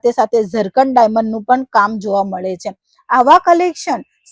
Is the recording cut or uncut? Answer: uncut